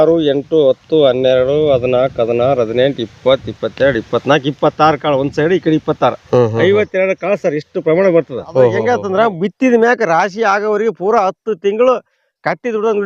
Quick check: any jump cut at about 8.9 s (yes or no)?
yes